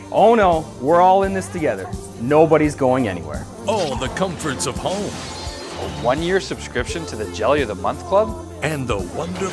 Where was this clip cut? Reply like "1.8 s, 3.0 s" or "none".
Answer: 0.9 s